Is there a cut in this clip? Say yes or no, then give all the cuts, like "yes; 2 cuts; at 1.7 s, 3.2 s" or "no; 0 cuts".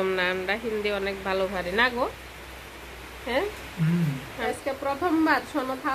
yes; 1 cut; at 4.4 s